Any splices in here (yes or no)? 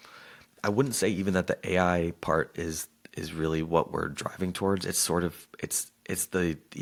no